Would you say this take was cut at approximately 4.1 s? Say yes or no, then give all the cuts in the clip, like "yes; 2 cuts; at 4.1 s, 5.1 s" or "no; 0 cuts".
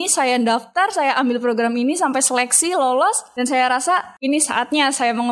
yes; 2 cuts; at 3.3 s, 4.1 s